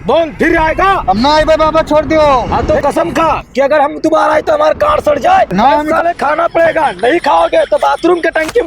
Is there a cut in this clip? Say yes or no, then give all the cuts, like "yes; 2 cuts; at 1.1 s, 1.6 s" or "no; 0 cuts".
yes; 2 cuts; at 2.5 s, 5.9 s